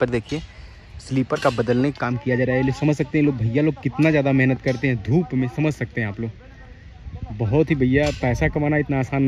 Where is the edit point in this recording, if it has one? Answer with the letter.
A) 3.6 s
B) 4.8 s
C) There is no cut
C